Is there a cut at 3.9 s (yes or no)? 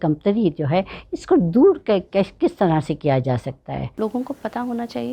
yes